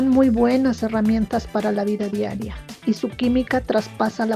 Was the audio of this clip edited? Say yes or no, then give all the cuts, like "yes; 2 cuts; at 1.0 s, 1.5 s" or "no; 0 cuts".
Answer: yes; 1 cut; at 2.7 s